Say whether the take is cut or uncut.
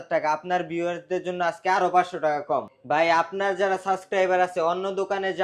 cut